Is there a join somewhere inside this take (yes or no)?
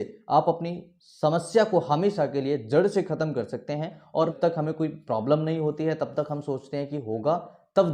yes